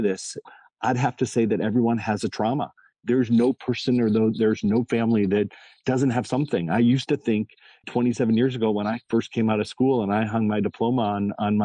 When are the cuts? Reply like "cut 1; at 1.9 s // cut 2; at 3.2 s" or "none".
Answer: none